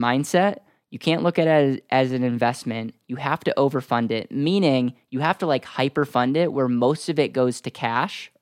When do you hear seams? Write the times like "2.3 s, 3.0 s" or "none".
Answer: none